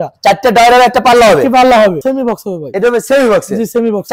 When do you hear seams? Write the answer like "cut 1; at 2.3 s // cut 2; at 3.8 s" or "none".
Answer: cut 1; at 2.0 s